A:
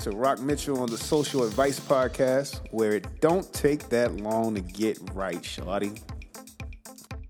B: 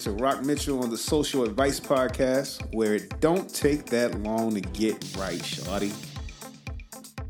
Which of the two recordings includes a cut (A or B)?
B